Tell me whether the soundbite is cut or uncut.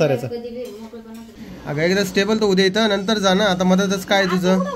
cut